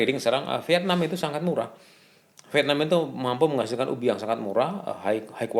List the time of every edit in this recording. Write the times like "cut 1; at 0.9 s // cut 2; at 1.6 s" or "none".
none